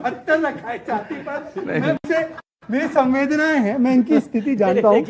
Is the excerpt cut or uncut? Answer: uncut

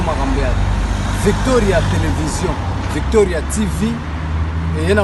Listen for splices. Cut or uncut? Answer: uncut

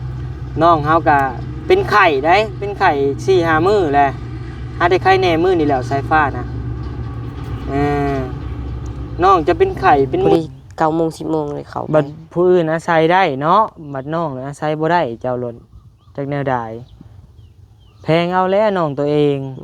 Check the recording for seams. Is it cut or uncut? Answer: cut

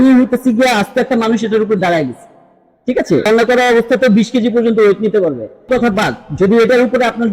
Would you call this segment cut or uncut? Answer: cut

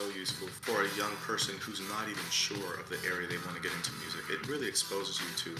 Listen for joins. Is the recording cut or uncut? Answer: uncut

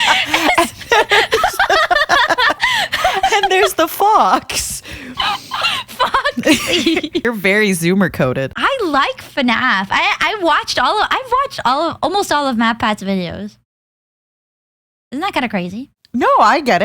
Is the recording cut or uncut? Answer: cut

